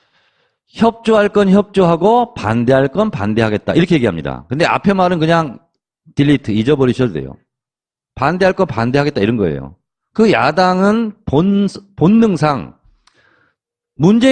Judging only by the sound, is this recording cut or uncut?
cut